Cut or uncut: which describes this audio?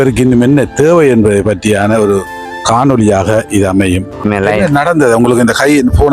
cut